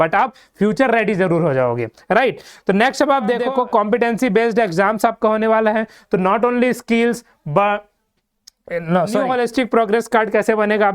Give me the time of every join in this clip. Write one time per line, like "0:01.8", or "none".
0:03.4
0:09.2

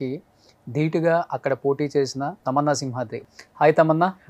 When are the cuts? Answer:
0:02.4
0:03.2

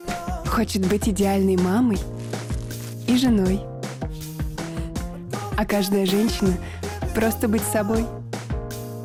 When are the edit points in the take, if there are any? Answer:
none

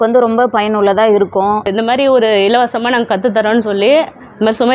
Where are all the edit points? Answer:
0:01.7

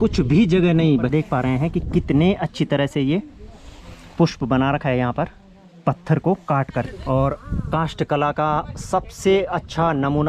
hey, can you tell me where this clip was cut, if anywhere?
0:01.1
0:06.9

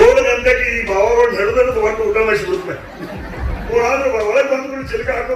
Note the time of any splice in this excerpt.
0:03.7

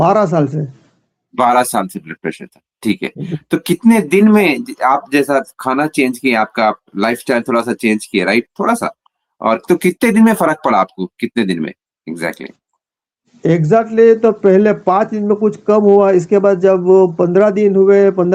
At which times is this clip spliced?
none

